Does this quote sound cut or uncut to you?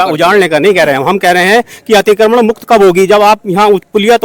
uncut